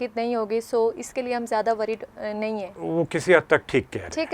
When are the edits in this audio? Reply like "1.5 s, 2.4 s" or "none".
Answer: 2.8 s